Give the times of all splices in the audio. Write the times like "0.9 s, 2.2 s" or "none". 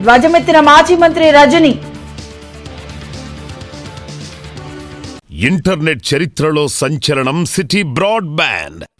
5.3 s